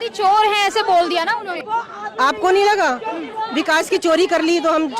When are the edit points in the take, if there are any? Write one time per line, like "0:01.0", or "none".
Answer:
0:01.6